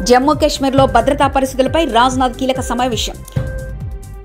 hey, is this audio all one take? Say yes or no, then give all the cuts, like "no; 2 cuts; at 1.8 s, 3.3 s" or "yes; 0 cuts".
yes; 0 cuts